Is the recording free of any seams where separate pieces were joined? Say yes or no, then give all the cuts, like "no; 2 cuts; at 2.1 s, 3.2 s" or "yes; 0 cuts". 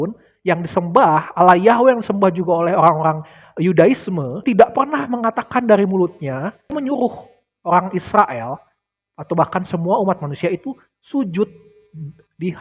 no; 2 cuts; at 4.4 s, 6.7 s